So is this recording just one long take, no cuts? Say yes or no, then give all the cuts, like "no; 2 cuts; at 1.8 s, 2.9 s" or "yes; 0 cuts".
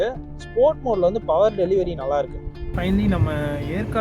no; 1 cut; at 2.7 s